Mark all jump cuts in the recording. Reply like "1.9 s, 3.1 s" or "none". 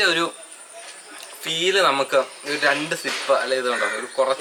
none